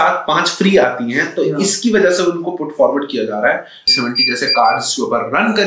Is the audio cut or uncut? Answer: cut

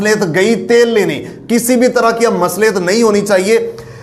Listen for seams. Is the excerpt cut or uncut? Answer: uncut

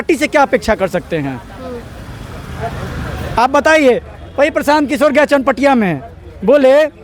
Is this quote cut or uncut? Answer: uncut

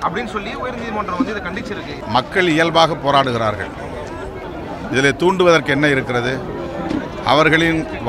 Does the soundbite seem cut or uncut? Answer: cut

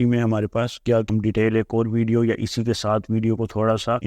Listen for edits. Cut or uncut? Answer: cut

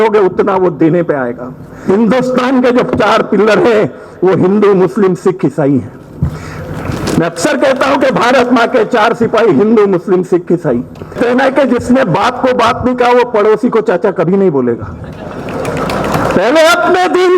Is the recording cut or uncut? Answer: cut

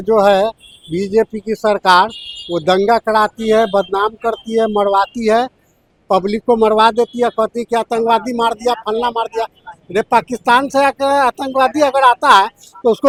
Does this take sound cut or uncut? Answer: uncut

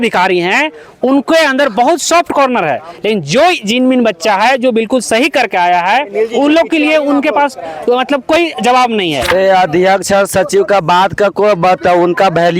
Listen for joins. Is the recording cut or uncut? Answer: cut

